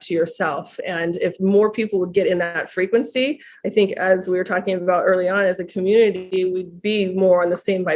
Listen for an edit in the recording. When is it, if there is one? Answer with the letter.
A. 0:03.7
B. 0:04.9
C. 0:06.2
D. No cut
C